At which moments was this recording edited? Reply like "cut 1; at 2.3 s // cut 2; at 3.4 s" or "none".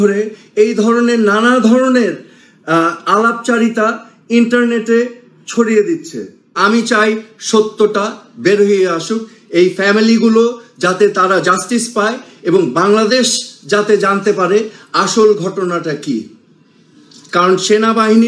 cut 1; at 6.6 s